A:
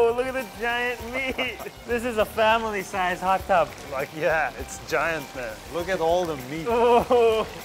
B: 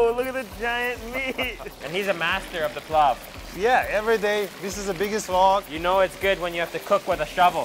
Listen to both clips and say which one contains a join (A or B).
B